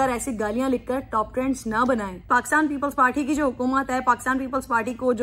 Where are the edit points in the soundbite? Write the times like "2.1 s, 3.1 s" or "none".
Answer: 2.2 s